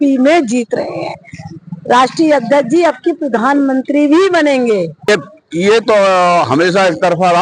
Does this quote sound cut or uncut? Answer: cut